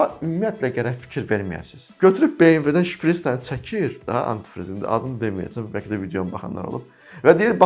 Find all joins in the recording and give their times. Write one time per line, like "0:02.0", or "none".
0:01.9